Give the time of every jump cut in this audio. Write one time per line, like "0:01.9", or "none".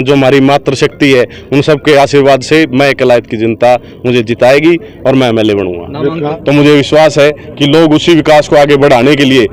0:06.3